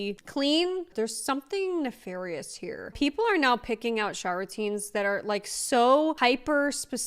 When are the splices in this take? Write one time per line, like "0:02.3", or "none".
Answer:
0:02.9
0:06.2